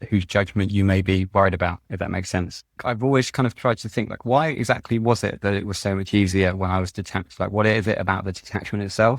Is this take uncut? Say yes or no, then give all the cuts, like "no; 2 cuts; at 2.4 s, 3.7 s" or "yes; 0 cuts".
no; 1 cut; at 2.8 s